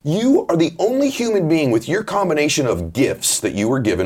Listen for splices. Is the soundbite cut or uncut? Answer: uncut